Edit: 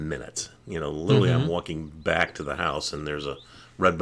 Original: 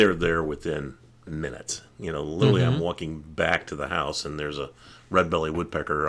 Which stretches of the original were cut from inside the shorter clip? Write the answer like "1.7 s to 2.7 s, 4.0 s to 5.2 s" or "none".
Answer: none